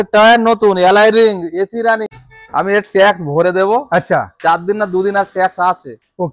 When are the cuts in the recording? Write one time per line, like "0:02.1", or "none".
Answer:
0:02.1